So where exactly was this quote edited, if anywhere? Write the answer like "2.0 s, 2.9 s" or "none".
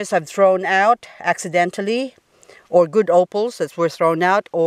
none